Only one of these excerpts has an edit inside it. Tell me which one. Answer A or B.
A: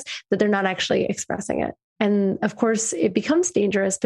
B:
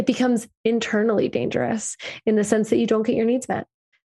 A